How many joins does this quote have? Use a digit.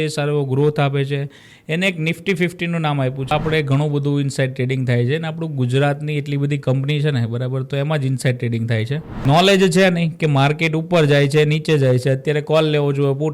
2